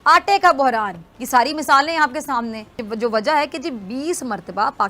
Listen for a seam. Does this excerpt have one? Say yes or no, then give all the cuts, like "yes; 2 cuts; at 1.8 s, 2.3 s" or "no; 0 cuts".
yes; 1 cut; at 2.8 s